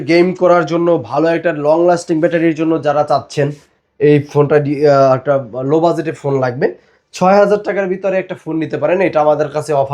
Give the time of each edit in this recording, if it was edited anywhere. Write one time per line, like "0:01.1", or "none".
none